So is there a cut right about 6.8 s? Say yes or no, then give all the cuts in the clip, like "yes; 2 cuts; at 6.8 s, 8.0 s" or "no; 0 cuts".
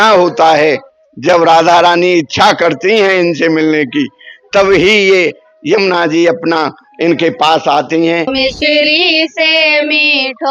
yes; 2 cuts; at 6.8 s, 8.3 s